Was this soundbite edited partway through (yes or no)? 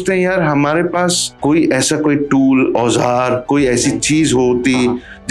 yes